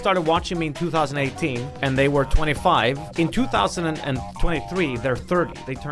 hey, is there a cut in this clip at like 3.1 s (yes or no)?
no